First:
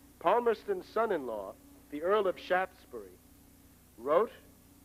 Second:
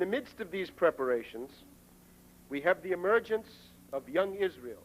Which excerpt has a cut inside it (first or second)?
second